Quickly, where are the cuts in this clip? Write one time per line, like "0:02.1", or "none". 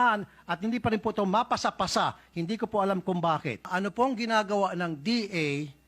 0:03.7